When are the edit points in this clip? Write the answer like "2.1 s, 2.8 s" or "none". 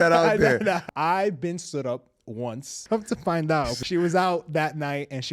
0.8 s, 2.7 s, 3.8 s

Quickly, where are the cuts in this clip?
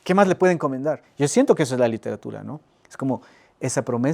1.1 s

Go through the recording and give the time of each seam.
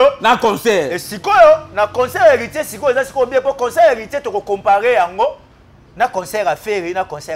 none

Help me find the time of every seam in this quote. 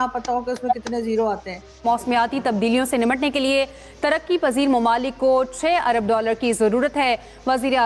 1.9 s

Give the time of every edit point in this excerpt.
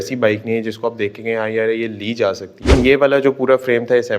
2.7 s

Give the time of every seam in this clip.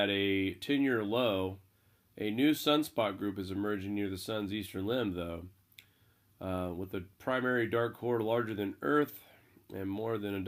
3.3 s

